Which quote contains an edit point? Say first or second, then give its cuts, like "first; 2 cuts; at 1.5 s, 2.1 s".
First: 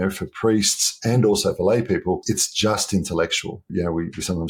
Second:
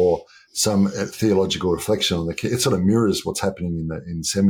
first; 2 cuts; at 2.2 s, 3.7 s